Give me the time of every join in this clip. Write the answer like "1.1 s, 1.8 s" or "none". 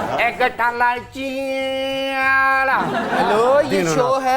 none

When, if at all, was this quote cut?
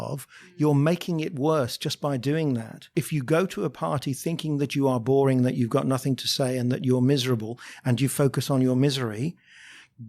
2.8 s

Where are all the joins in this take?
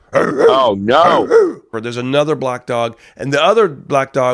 1.8 s

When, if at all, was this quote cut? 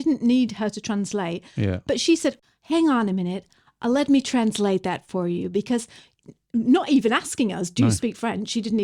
2.4 s

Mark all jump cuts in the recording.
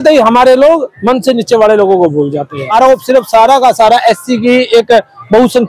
2.6 s

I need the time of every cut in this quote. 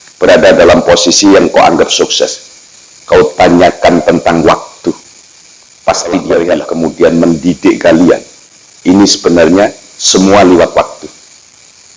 6.4 s

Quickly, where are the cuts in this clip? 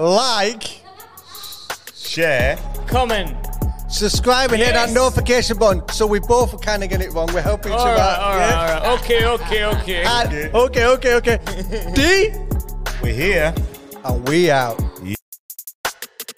15.1 s

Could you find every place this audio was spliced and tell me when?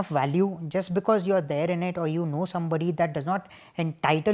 none

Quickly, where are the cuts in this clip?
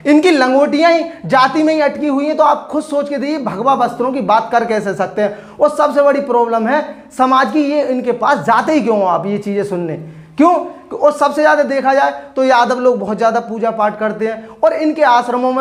none

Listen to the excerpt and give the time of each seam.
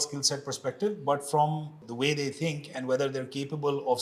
none

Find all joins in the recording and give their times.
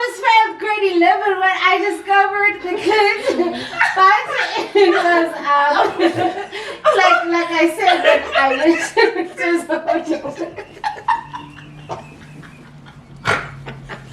none

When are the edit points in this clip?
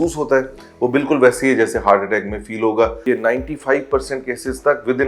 3.0 s

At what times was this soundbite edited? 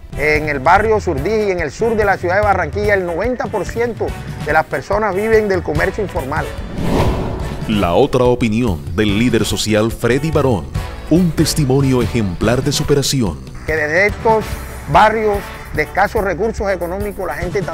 8.1 s

